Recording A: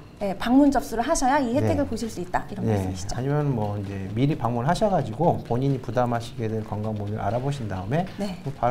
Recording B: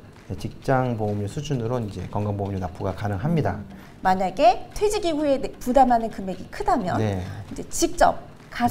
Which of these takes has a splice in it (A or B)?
B